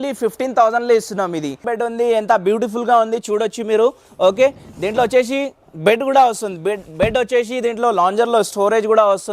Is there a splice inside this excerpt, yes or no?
yes